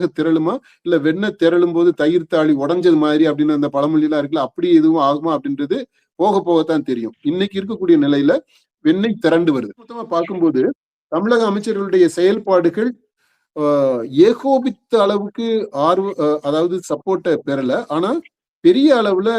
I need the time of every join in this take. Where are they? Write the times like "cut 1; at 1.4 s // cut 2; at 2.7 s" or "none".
cut 1; at 10.1 s